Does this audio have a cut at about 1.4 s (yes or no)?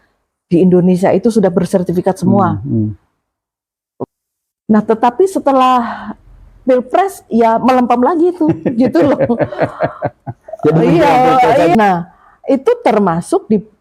no